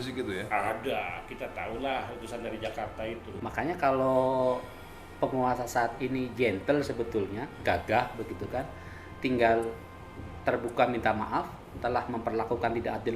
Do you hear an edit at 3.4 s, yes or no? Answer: yes